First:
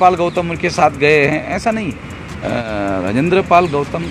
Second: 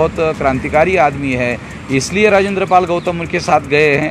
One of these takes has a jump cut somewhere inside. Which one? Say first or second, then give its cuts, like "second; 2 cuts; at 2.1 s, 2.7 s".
first; 1 cut; at 2.4 s